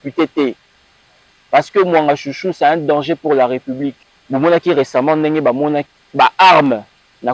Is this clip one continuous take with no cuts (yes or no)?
no